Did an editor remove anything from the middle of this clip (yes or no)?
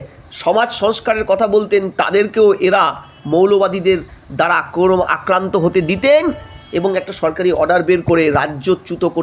no